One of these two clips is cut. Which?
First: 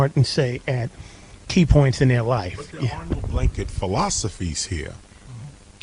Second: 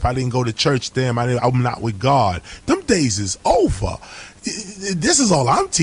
first; 1 cut; at 4.9 s

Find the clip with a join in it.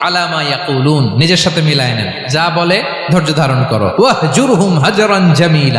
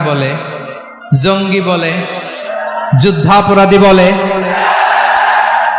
first; 1 cut; at 3.9 s

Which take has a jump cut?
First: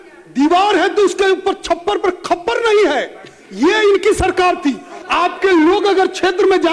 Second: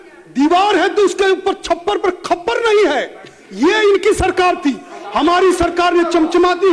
first; 1 cut; at 4.9 s

